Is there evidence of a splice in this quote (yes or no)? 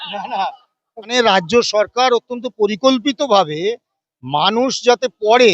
yes